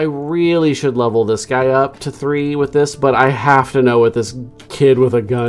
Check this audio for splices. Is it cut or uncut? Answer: uncut